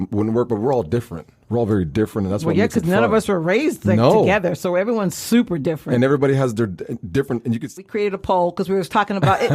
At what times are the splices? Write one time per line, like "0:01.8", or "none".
0:07.7